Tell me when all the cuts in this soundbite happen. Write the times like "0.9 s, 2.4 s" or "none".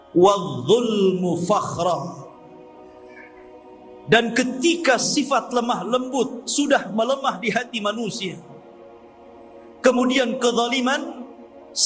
none